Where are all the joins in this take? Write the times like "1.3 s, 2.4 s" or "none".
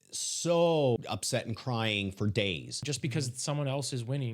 1.0 s, 2.9 s